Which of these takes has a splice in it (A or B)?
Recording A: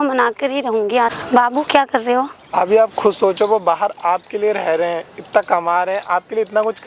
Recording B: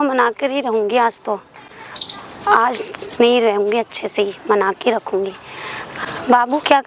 A